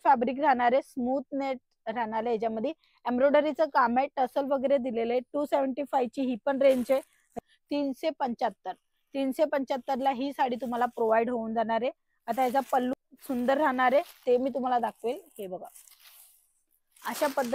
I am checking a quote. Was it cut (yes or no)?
yes